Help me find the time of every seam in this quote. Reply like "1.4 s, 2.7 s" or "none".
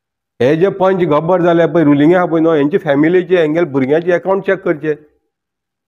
none